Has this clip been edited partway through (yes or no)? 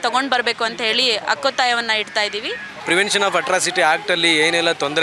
yes